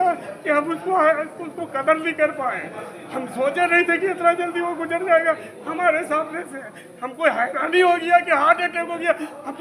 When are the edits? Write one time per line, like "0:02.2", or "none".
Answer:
none